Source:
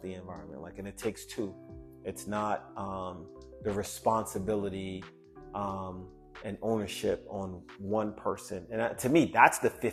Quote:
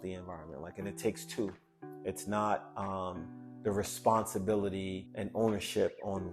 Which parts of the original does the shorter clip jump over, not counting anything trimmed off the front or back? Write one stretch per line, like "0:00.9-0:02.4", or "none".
0:05.0-0:06.3